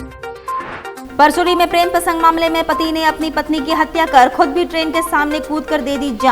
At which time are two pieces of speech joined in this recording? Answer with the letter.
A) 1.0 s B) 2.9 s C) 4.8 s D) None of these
A